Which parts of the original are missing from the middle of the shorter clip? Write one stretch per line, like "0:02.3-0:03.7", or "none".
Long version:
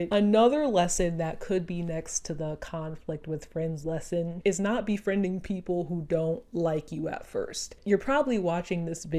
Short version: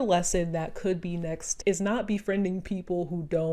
0:02.2-0:04.3